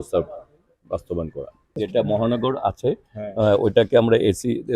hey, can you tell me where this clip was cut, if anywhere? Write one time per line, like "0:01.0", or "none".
0:01.7